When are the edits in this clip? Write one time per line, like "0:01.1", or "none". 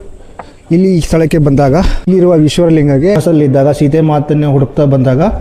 0:03.2